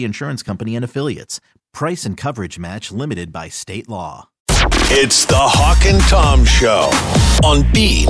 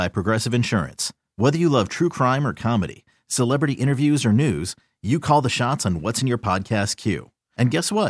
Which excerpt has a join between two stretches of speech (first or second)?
first